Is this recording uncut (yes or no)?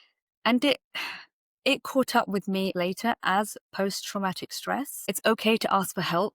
no